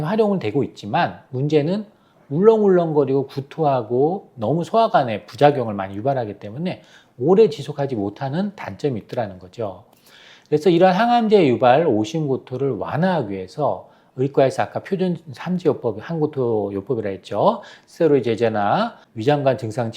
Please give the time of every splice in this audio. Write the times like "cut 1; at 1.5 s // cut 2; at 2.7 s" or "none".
cut 1; at 19.1 s